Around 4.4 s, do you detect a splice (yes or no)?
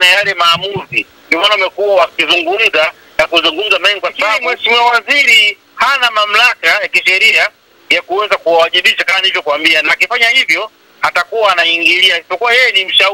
yes